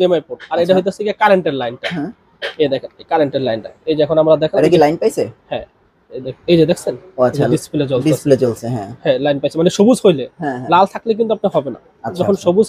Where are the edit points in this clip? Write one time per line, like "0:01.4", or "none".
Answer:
none